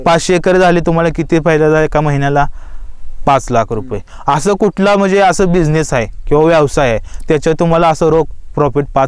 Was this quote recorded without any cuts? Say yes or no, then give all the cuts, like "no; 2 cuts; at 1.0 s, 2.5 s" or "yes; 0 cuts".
yes; 0 cuts